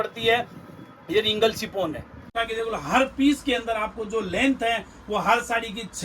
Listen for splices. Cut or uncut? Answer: cut